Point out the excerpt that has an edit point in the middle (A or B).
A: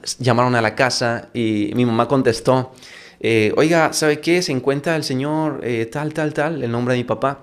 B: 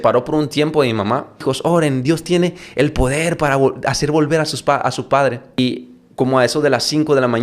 B